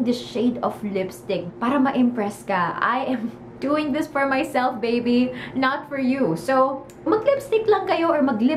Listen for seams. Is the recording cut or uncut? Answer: cut